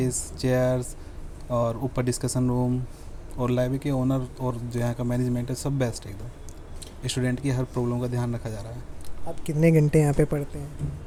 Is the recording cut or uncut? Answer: uncut